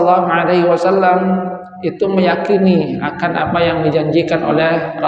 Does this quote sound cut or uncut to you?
uncut